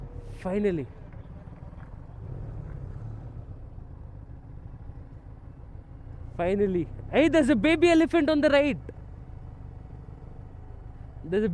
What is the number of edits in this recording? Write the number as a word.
zero